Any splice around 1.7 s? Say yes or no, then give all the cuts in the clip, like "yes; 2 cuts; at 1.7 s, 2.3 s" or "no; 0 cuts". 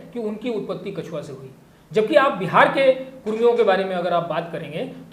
no; 0 cuts